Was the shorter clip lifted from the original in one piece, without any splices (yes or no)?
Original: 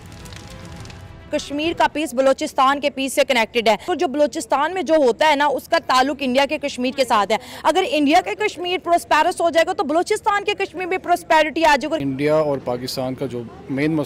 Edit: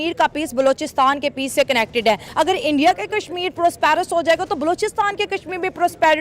no